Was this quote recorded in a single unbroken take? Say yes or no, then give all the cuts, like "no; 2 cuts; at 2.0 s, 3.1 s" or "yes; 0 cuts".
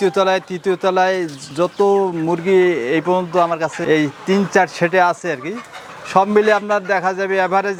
yes; 0 cuts